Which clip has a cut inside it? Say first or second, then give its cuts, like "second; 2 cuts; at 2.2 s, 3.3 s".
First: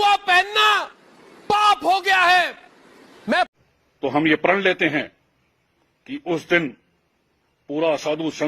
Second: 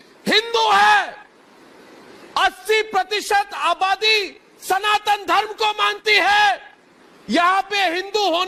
first; 1 cut; at 3.5 s